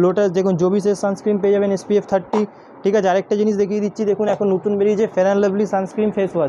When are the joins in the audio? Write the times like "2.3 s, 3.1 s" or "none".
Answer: none